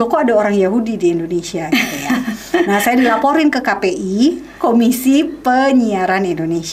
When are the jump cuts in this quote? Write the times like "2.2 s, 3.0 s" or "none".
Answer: none